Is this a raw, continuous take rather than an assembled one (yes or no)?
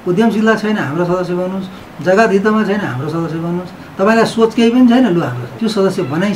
no